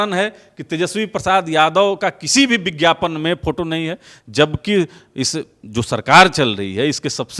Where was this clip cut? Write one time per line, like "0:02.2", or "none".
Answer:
none